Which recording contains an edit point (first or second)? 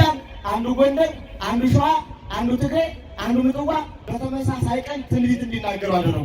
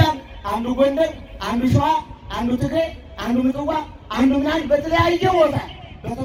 first